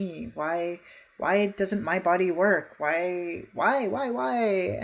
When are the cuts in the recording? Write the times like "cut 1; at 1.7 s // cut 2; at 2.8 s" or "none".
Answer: none